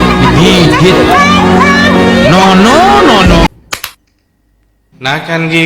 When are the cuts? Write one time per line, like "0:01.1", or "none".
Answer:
0:03.5

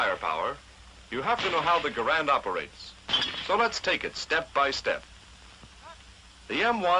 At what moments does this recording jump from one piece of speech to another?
0:04.2

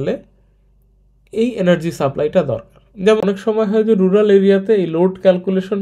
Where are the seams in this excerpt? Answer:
0:03.2

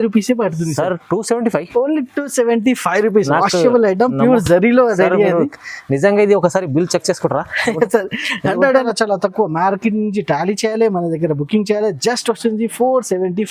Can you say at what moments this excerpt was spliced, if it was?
0:08.8

